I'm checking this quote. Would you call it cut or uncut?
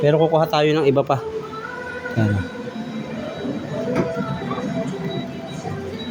uncut